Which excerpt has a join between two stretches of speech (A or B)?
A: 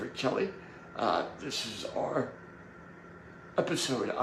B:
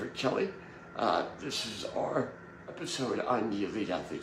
B